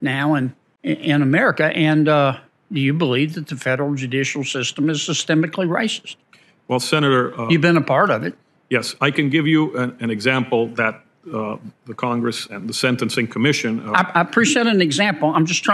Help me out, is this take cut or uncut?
uncut